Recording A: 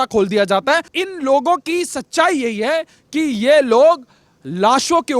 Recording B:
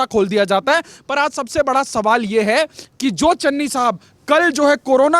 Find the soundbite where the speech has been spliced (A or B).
A